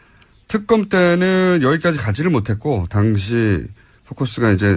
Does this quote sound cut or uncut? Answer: cut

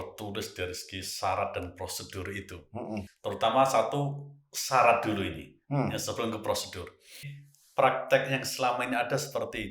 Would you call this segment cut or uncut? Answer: cut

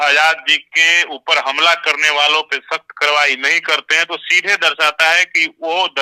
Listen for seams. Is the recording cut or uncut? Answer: uncut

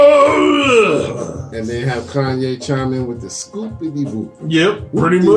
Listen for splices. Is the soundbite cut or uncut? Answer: uncut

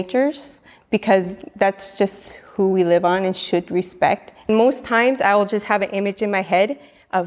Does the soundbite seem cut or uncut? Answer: cut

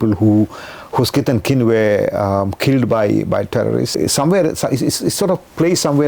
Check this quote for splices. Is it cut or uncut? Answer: cut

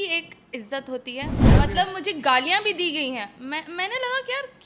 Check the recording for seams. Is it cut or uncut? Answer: cut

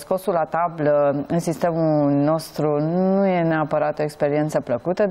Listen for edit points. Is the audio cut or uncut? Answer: uncut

